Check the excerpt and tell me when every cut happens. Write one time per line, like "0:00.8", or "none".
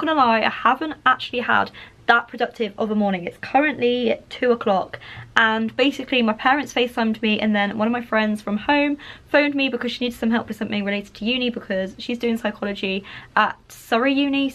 none